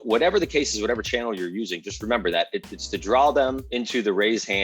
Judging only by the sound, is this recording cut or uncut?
cut